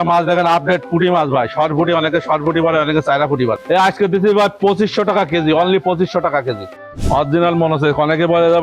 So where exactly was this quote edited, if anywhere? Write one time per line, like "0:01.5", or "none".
0:03.6
0:06.8